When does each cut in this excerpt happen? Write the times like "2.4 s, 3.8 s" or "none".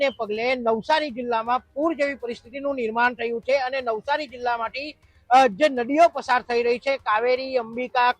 none